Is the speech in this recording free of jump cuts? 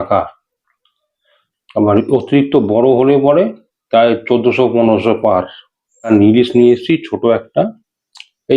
no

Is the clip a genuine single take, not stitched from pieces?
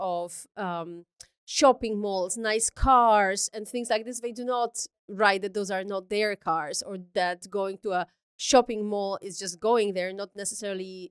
yes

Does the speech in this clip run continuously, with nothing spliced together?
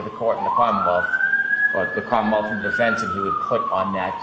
yes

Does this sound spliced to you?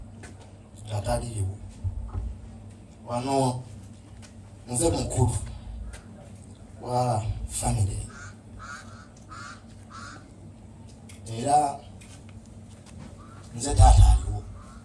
no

